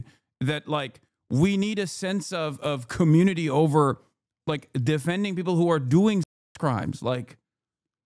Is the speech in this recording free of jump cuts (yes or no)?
yes